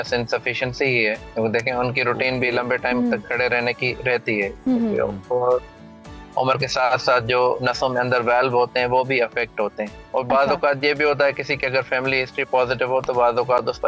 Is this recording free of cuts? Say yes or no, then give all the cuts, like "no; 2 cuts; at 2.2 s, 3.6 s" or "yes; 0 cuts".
yes; 0 cuts